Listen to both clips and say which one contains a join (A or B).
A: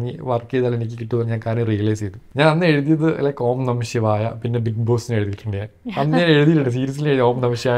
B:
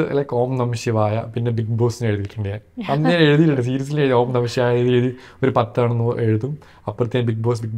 A